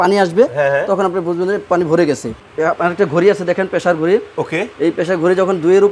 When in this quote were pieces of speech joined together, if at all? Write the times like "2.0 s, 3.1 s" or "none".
2.4 s